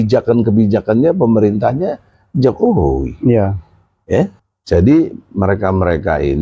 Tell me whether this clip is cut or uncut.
cut